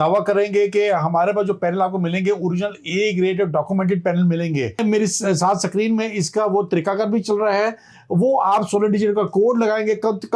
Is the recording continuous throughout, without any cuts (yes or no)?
no